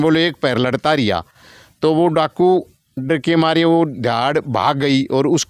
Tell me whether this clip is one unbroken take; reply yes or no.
yes